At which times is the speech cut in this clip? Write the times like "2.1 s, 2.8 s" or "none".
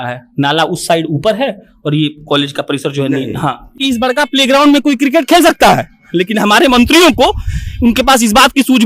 3.8 s